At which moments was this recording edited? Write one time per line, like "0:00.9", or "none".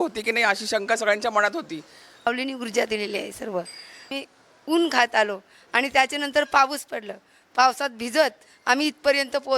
0:02.3
0:04.2